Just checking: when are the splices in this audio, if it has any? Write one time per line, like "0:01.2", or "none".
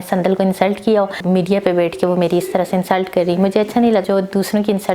0:01.2
0:04.0